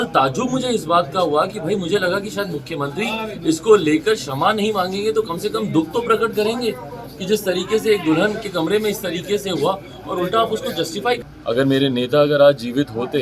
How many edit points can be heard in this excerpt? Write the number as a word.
one